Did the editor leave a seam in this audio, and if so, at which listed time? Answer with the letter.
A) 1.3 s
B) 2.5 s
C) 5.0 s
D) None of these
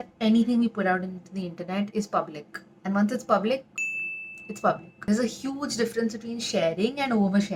D